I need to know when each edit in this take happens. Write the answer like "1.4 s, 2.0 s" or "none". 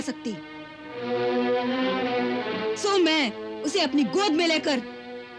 none